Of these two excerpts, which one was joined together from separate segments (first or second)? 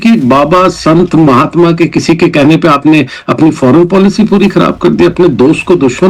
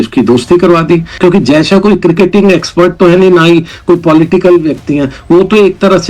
second